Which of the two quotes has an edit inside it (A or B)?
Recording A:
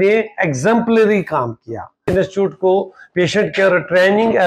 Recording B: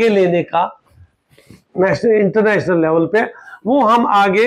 A